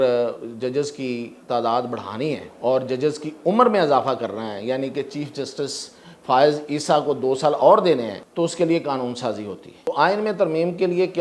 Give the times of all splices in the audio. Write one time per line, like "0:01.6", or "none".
0:02.5
0:08.2
0:09.9